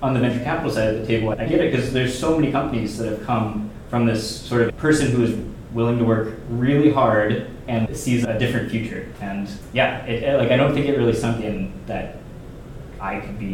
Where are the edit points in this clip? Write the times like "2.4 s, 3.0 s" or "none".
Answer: 4.7 s